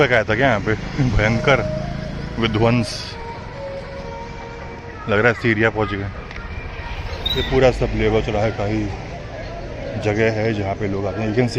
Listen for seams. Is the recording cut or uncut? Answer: cut